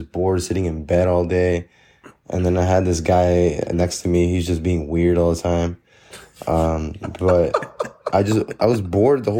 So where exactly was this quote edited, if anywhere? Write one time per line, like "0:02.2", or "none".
none